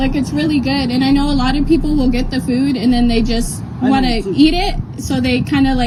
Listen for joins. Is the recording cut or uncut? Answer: uncut